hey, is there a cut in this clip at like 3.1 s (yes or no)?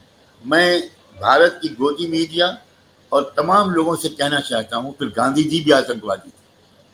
no